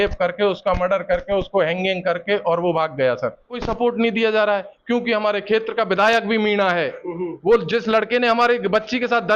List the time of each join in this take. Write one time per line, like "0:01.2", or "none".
0:03.5